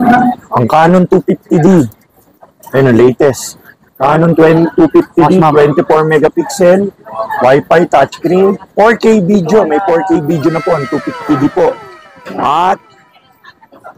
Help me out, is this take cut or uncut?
uncut